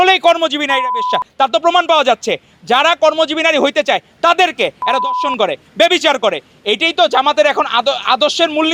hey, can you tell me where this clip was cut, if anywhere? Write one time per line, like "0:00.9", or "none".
none